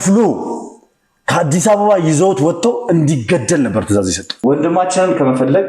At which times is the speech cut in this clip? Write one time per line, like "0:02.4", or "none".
0:04.3